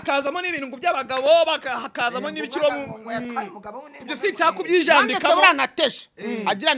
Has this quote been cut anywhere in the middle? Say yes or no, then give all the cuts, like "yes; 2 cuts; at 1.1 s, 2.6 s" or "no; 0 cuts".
no; 0 cuts